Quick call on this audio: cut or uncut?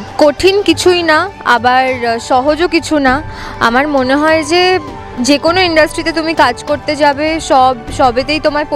uncut